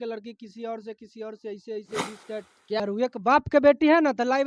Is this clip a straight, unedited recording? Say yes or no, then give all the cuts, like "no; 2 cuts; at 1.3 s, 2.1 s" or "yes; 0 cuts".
no; 1 cut; at 2.8 s